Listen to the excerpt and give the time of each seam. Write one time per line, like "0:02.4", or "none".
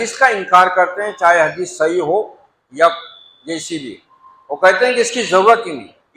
none